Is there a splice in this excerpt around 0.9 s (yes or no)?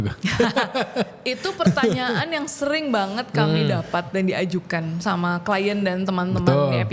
no